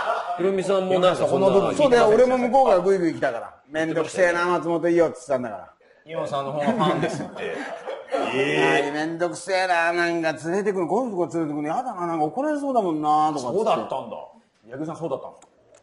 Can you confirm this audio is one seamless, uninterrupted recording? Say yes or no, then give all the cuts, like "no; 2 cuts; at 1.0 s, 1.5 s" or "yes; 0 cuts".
no; 1 cut; at 3.6 s